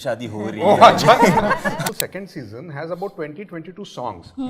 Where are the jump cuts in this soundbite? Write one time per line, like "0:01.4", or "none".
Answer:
0:01.8